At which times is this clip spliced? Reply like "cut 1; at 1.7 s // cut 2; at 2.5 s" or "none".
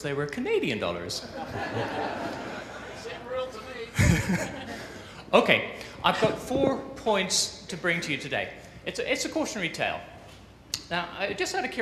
cut 1; at 10.0 s